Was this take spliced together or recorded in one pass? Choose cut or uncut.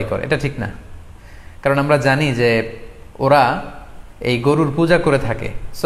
uncut